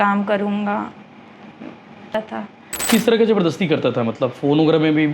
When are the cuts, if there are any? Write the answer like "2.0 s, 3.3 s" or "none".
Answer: 2.2 s